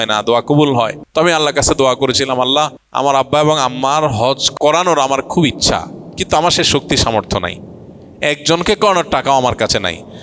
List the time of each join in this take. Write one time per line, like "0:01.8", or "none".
0:01.0
0:02.8
0:04.5

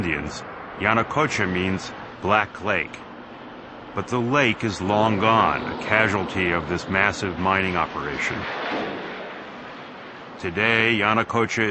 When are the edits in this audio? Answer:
0:01.2

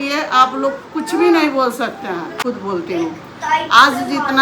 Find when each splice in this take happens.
0:02.3

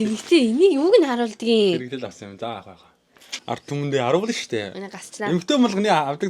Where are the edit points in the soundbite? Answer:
0:03.3

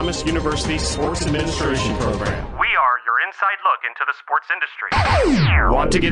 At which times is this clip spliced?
0:04.9

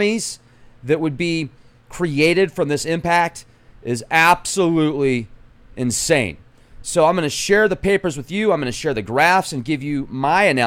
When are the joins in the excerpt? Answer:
0:07.8

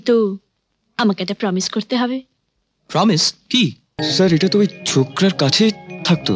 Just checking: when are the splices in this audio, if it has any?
0:04.0

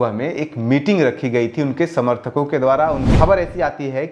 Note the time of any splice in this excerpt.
0:03.1

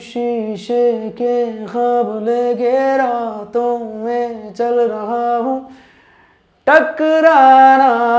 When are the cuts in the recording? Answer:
none

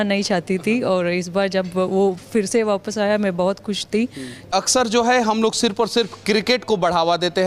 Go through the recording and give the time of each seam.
0:04.5

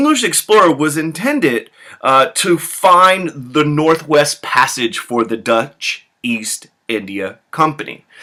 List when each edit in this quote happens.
none

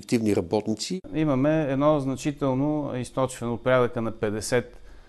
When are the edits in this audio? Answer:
0:00.9

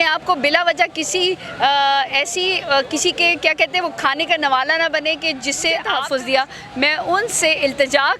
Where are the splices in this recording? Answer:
0:05.9

